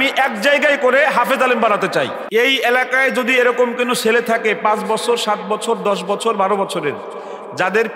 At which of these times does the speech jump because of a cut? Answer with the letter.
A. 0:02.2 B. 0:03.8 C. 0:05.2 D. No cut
A